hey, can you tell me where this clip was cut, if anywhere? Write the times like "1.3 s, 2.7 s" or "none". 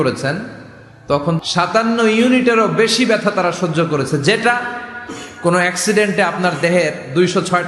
1.4 s

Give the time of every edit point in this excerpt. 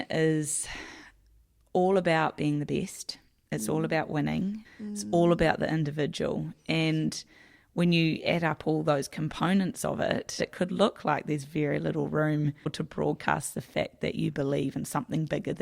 4.6 s, 10.4 s, 12.7 s

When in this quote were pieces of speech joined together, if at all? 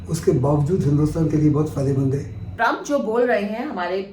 2.4 s

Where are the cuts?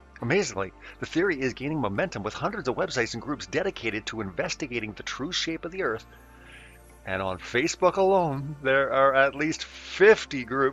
3.5 s

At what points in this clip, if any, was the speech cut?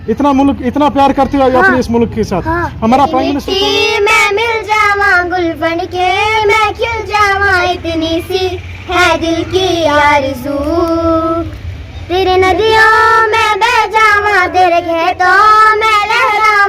3.4 s

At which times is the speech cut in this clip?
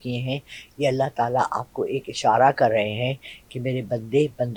none

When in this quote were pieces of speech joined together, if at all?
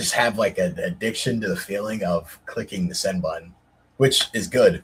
none

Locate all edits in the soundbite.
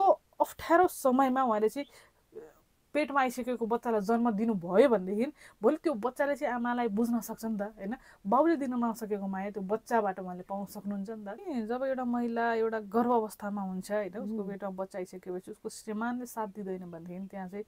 11.4 s

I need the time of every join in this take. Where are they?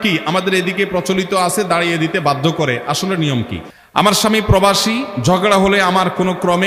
3.6 s

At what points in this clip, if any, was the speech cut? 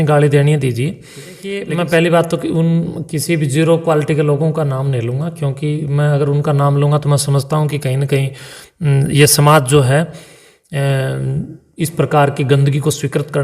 1.6 s

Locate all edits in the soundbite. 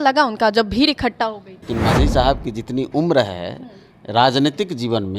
1.7 s

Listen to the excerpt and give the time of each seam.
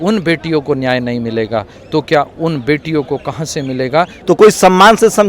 4.1 s

